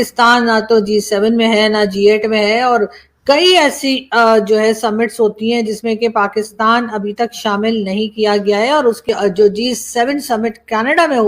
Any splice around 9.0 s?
yes; 1 cut; at 9.0 s

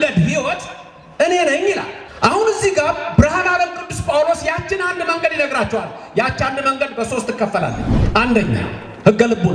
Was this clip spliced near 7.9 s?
yes; 2 cuts; at 2.0 s, 7.9 s

